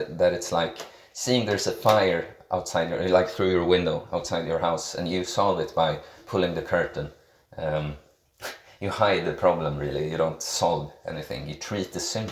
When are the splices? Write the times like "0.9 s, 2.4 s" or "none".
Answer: none